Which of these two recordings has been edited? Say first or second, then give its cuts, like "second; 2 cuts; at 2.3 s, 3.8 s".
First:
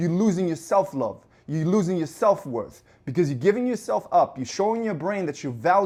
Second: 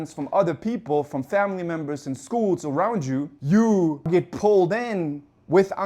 second; 2 cuts; at 3.3 s, 4.1 s